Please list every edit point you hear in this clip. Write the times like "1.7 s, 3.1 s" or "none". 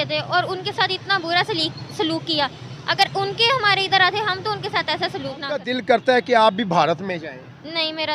5.6 s